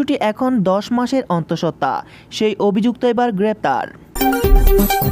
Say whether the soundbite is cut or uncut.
cut